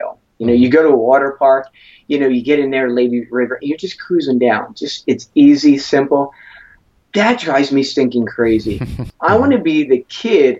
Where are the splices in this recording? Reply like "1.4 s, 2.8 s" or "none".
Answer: 9.0 s